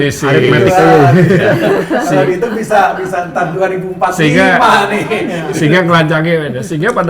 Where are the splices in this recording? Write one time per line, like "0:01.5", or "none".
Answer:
none